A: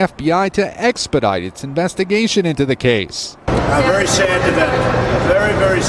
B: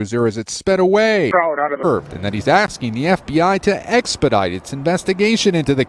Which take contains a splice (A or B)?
B